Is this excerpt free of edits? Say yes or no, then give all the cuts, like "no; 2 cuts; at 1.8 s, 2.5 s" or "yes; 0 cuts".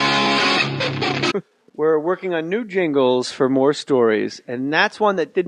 yes; 0 cuts